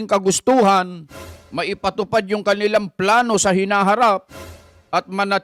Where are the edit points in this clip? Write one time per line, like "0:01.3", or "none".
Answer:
none